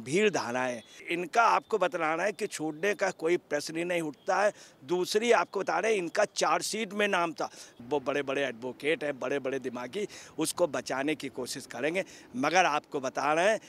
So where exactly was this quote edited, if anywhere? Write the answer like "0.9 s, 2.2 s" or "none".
1.1 s, 7.8 s